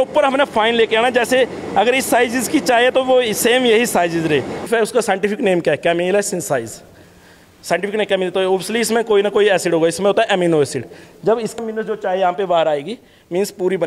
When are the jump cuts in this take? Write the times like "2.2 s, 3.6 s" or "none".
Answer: 4.6 s, 11.6 s